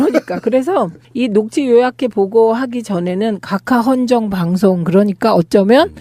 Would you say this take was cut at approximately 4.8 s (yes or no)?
no